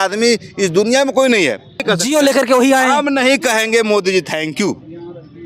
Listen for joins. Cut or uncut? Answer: cut